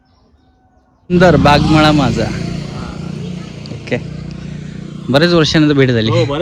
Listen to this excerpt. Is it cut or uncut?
cut